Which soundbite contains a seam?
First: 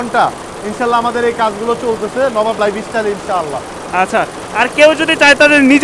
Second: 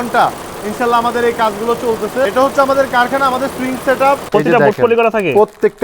second; 2 cuts; at 2.3 s, 4.2 s

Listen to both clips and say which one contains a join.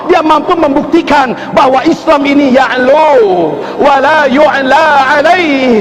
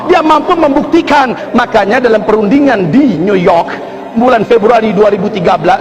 second; 1 cut; at 1.4 s

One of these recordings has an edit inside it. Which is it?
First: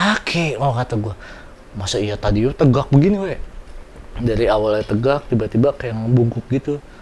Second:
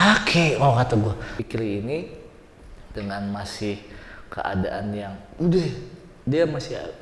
second; 1 cut; at 1.4 s

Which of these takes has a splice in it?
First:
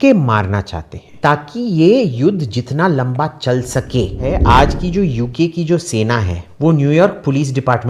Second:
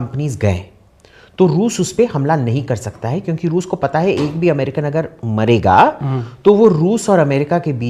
first; 3 cuts; at 1.1 s, 4.2 s, 6.4 s

